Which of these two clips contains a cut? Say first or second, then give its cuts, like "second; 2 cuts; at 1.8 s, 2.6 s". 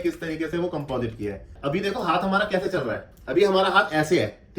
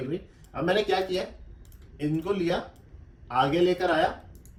first; 1 cut; at 1.5 s